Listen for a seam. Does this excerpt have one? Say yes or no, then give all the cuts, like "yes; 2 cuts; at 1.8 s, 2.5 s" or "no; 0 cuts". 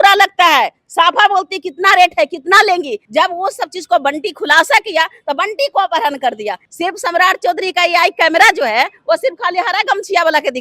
yes; 2 cuts; at 3.0 s, 6.6 s